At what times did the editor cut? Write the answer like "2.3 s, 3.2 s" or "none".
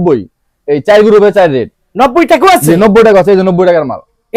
none